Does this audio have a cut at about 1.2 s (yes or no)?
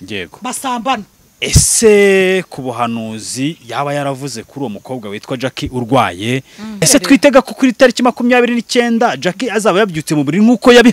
yes